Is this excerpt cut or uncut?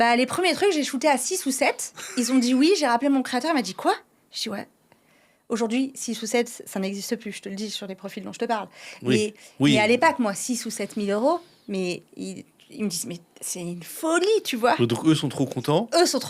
uncut